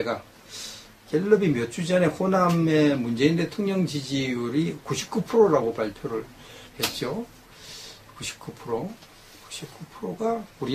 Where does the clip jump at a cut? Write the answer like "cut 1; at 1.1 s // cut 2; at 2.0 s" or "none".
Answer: cut 1; at 8.4 s